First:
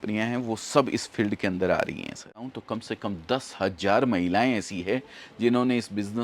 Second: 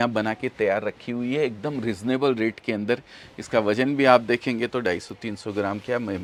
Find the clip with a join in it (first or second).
first